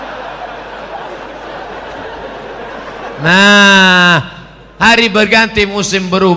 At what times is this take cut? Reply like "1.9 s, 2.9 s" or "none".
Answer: 1.0 s